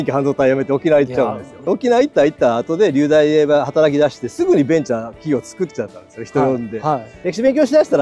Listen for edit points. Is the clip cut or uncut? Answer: cut